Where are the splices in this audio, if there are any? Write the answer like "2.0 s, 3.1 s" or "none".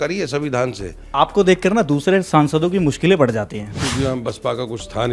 1.0 s, 3.8 s